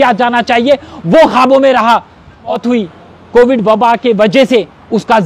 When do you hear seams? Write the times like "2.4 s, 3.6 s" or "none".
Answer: 2.5 s